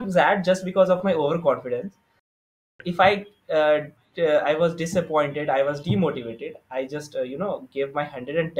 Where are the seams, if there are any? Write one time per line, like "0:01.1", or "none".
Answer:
0:02.6